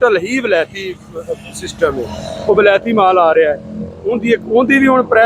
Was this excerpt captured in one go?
yes; 0 cuts

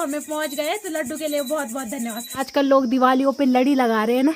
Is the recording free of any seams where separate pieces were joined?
no; 1 cut; at 2.4 s

